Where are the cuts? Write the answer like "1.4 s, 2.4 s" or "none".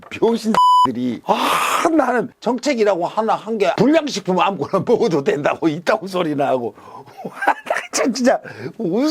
2.3 s, 3.7 s